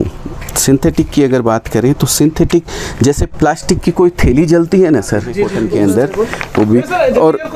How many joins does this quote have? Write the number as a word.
one